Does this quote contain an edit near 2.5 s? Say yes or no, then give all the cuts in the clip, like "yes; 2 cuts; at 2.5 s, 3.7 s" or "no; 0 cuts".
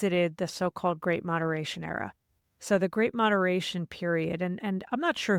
no; 0 cuts